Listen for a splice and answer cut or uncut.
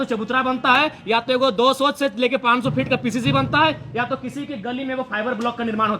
uncut